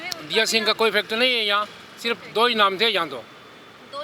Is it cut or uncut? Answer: uncut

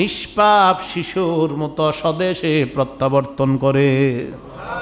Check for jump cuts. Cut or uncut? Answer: uncut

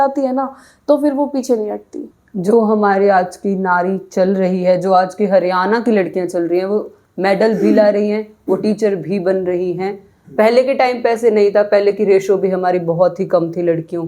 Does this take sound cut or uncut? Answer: uncut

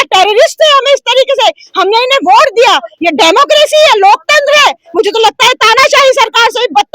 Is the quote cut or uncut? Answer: uncut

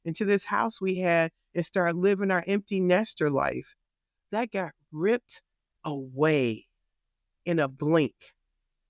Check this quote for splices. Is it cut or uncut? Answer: uncut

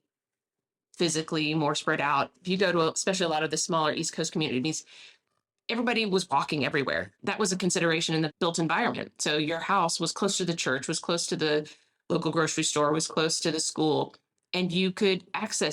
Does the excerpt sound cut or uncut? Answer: cut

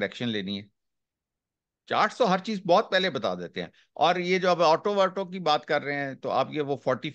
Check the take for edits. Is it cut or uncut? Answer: uncut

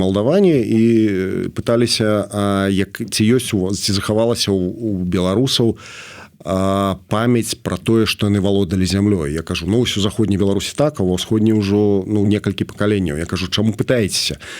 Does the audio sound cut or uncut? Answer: uncut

